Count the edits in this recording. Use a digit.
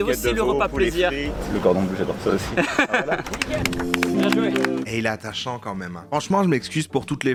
0